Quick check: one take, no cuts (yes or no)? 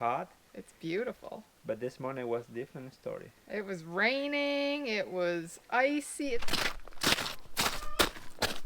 no